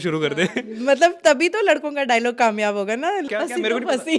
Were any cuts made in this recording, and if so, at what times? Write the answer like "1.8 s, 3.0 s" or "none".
3.3 s